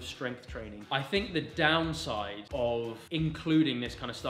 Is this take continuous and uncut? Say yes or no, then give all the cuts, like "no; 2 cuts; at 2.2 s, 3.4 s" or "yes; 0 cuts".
no; 3 cuts; at 0.8 s, 2.4 s, 3.0 s